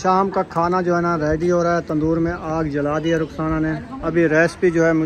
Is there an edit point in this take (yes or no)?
yes